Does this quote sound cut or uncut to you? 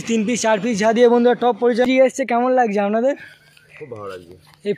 cut